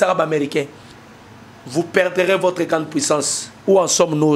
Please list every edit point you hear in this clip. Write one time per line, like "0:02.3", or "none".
none